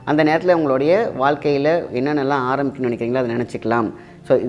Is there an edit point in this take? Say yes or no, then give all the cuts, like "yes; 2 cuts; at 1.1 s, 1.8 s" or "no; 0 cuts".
no; 0 cuts